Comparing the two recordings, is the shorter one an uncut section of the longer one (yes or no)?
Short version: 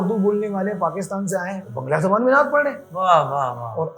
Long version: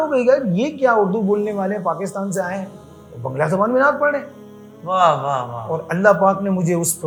no